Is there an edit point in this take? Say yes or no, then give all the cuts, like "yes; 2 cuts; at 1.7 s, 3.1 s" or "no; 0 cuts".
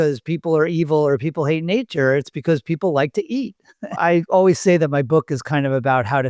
yes; 1 cut; at 4.0 s